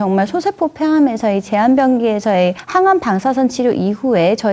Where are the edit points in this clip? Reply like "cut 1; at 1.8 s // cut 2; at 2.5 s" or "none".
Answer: none